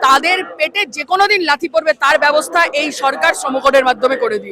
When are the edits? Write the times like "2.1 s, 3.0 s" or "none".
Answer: none